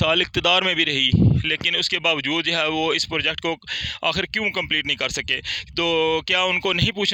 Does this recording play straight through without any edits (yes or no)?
yes